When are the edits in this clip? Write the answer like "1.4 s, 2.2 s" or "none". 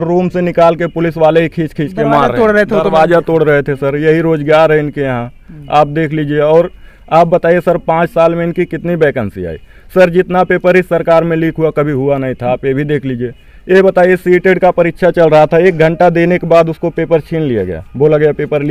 none